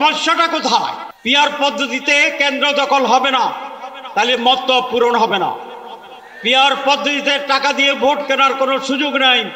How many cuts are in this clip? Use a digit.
1